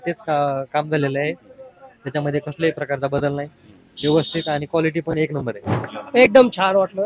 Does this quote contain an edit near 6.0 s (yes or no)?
yes